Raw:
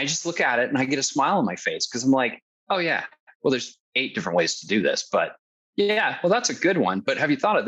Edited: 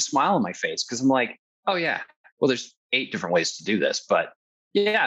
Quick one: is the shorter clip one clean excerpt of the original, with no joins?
yes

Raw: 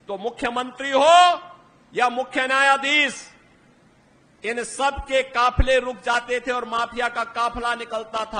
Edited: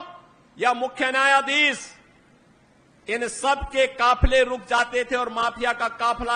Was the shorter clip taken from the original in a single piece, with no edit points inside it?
yes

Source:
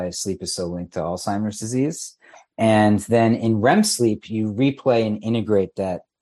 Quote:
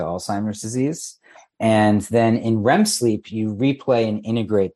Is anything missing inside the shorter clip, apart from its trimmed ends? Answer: no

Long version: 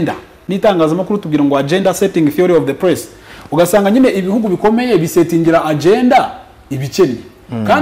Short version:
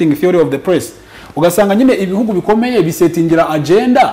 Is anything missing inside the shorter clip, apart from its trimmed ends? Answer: no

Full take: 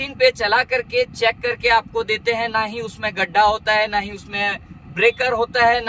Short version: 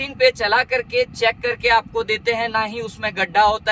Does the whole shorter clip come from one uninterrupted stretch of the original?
yes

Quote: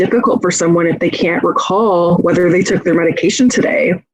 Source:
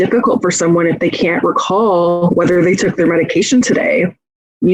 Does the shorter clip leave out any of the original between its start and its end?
yes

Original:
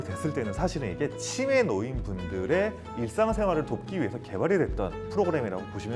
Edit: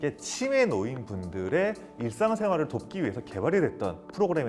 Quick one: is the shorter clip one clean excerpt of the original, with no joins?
yes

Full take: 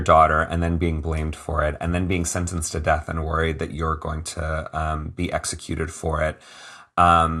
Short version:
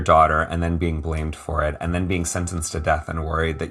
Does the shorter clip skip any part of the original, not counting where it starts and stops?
no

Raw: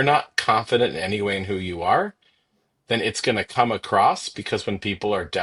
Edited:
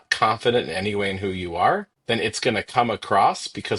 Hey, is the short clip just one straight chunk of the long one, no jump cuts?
no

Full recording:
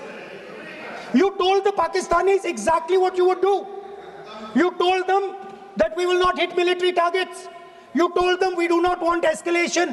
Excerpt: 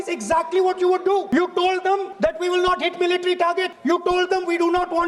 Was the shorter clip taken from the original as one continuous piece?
no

